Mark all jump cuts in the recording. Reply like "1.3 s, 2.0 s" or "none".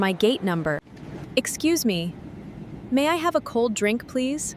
0.9 s